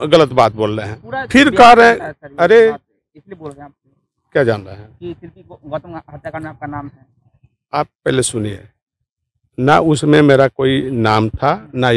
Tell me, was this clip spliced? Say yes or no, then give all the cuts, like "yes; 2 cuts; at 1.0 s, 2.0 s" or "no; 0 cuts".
no; 0 cuts